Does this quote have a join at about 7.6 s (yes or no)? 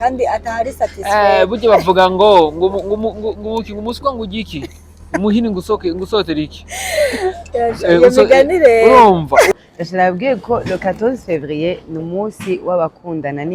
no